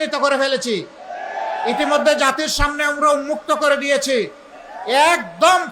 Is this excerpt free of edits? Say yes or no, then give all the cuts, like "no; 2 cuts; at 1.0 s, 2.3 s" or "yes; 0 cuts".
yes; 0 cuts